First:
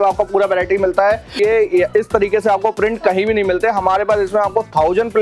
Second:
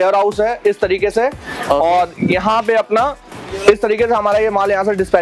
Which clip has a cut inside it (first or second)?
first